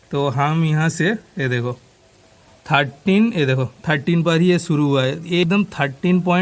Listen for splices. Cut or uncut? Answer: cut